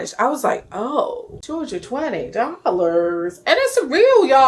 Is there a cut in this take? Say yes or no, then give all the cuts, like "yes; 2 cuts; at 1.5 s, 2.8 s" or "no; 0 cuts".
no; 0 cuts